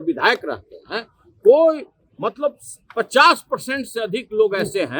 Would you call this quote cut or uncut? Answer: uncut